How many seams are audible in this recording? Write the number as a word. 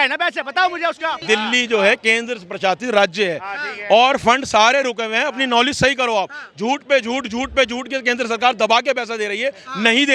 one